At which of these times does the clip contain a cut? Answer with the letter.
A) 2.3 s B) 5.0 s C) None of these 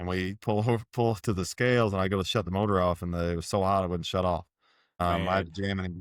B